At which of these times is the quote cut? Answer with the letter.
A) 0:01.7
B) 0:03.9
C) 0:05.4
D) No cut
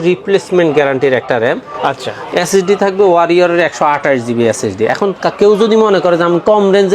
D